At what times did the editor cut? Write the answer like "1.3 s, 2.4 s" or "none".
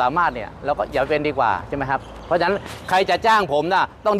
none